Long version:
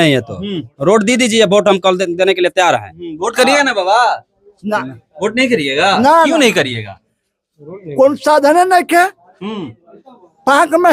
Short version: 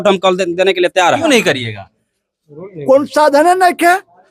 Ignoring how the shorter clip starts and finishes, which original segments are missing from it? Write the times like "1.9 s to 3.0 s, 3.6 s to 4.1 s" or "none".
2.8 s to 6.3 s